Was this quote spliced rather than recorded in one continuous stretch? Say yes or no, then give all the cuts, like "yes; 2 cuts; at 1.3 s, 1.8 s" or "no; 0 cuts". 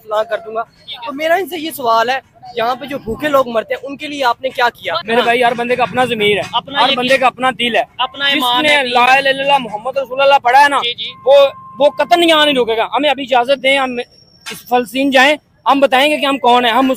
no; 0 cuts